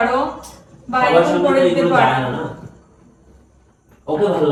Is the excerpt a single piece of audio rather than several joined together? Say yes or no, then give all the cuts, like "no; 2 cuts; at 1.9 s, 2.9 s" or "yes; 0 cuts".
yes; 0 cuts